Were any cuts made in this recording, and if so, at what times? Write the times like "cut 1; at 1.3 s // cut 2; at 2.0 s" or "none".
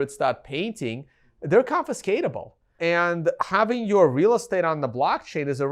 cut 1; at 2.7 s